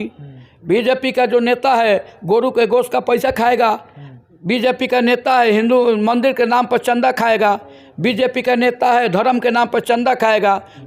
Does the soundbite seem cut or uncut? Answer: uncut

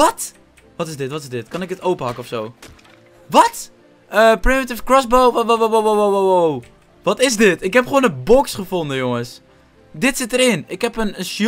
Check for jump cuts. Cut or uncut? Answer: uncut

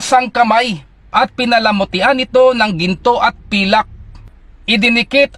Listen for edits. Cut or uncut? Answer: cut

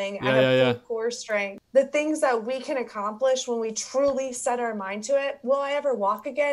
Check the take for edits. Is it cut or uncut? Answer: cut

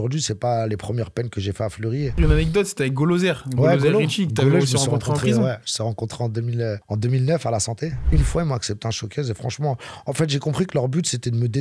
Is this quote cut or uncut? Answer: cut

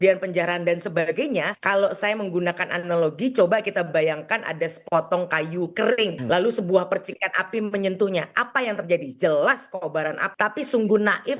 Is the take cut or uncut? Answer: cut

